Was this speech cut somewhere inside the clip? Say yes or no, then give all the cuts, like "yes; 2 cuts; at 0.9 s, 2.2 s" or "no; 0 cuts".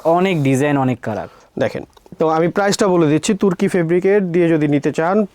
no; 0 cuts